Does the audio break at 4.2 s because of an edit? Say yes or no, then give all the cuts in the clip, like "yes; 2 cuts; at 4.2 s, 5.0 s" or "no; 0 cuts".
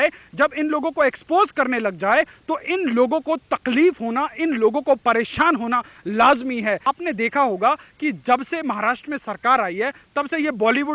no; 1 cut; at 6.8 s